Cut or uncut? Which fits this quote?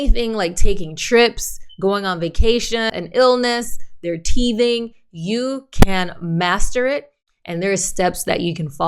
cut